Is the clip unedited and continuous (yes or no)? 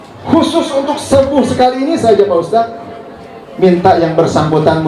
yes